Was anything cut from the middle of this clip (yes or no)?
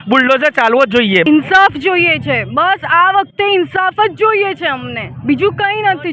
yes